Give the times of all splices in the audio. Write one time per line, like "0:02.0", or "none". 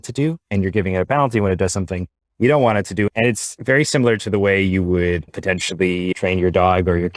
0:03.3
0:06.1